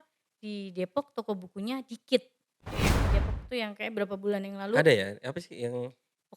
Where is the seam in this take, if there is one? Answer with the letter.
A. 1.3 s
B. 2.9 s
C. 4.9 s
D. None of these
B